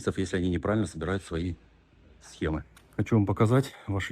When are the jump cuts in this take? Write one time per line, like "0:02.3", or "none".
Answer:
0:02.6